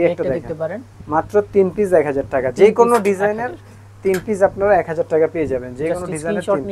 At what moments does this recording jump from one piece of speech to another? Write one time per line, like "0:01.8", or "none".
0:00.9